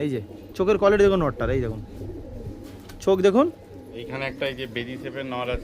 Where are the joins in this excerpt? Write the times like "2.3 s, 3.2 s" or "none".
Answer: 4.0 s